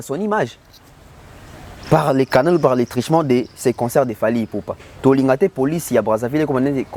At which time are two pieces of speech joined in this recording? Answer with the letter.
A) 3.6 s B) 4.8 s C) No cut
B